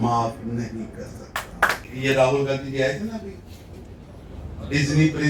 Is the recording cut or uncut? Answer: uncut